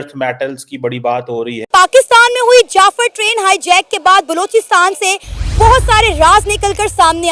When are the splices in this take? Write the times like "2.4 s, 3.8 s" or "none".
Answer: 1.6 s